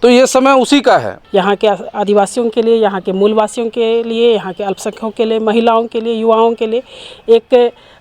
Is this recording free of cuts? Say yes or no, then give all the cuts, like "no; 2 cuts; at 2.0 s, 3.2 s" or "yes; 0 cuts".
no; 1 cut; at 1.2 s